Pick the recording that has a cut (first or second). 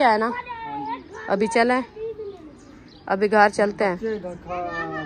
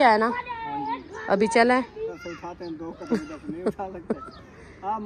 second